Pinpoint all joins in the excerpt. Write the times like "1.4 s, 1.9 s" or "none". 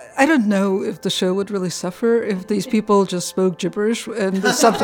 1.0 s